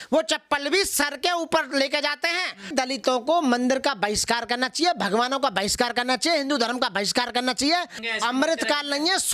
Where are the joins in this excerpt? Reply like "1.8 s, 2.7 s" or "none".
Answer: 2.7 s, 8.0 s